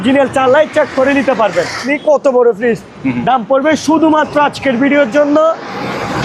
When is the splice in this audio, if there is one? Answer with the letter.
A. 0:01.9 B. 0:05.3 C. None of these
A